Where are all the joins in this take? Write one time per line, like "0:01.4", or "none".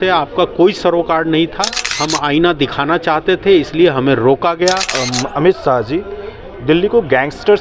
0:01.8
0:04.9